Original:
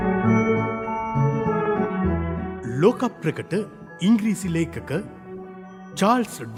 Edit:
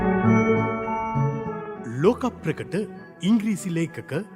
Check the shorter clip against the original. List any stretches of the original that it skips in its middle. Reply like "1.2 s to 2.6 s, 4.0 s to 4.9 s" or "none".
1.6 s to 2.4 s